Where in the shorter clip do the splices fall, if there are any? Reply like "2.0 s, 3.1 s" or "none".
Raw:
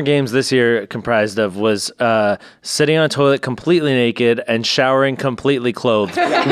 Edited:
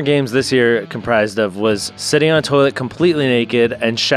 1.9 s